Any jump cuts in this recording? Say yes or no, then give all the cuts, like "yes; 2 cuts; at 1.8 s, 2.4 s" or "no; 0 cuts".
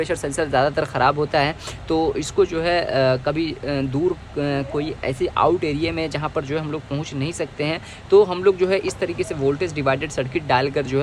no; 0 cuts